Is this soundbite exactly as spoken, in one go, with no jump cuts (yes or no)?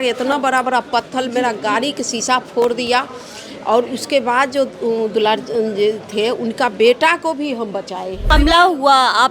no